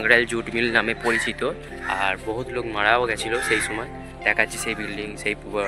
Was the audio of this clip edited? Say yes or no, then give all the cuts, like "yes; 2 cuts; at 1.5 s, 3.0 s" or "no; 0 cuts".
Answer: yes; 1 cut; at 1.7 s